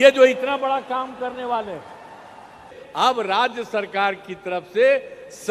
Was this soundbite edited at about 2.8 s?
yes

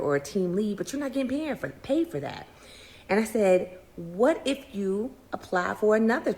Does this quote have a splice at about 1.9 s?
yes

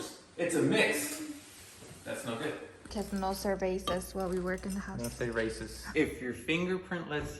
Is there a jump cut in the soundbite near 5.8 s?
yes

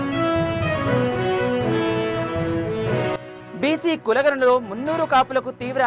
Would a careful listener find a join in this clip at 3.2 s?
yes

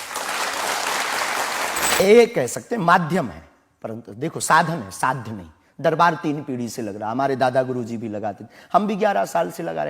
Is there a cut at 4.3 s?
no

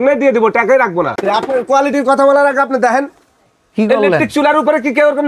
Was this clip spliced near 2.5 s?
no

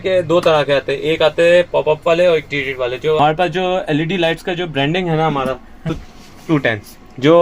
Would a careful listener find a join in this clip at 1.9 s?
no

